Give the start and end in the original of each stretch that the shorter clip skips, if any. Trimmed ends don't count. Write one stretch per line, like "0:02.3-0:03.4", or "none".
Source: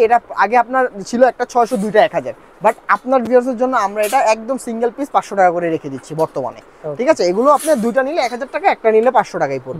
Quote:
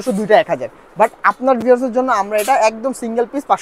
none